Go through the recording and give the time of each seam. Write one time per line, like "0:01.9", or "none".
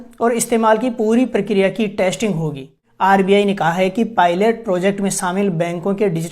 0:02.8